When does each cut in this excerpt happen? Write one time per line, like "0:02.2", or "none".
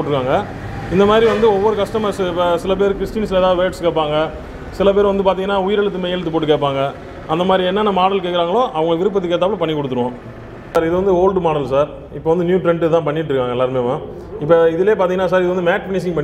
0:10.8